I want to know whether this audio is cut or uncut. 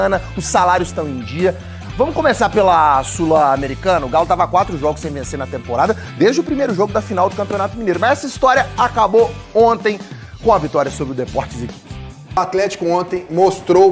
cut